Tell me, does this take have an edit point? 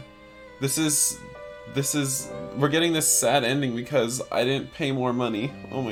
no; 0 cuts

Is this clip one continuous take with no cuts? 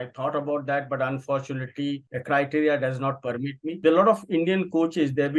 no; 2 cuts; at 2.1 s, 3.6 s

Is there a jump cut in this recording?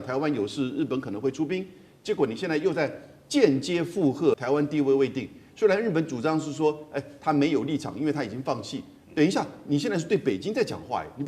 yes; 1 cut; at 4.4 s

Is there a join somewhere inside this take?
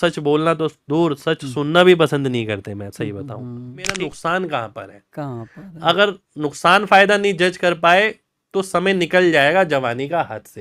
yes; 1 cut; at 3.9 s

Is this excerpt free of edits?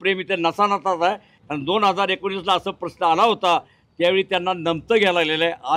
no; 1 cut; at 1.3 s

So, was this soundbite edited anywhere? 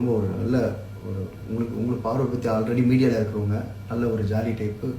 no; 0 cuts

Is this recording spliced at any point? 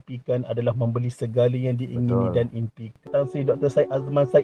yes; 1 cut; at 3.1 s

